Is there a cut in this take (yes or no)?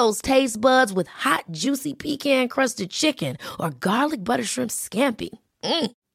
no